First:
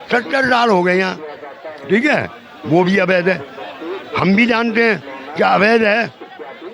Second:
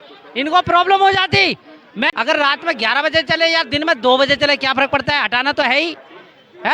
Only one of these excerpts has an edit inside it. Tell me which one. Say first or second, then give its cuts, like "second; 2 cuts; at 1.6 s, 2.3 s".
second; 1 cut; at 2.1 s